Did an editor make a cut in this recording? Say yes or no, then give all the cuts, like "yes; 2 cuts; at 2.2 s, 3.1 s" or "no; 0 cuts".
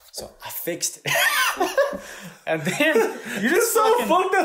no; 0 cuts